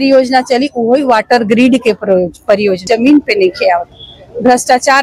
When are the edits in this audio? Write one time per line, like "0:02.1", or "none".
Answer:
0:02.8